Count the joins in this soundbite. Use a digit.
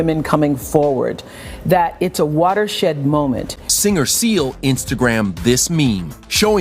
1